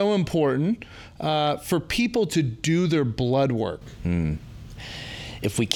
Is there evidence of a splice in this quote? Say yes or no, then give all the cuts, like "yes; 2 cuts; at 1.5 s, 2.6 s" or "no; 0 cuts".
no; 0 cuts